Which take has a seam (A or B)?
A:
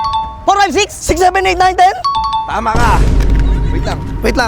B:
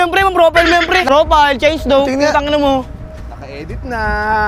B